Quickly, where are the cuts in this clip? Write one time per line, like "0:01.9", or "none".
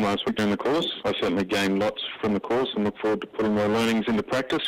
0:00.9
0:02.1